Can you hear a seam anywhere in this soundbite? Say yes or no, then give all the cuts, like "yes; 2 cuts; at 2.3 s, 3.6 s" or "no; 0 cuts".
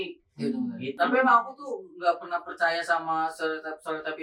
yes; 1 cut; at 1.0 s